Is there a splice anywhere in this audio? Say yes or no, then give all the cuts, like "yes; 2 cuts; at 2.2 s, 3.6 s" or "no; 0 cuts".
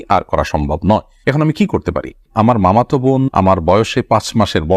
yes; 1 cut; at 2.3 s